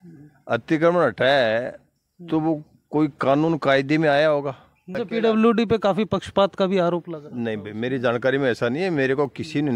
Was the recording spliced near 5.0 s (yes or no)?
yes